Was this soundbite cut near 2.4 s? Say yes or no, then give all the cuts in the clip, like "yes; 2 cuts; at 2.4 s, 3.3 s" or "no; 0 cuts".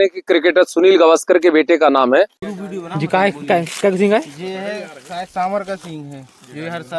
yes; 1 cut; at 2.4 s